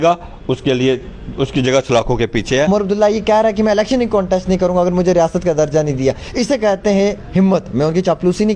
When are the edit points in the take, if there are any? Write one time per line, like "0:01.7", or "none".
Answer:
0:02.7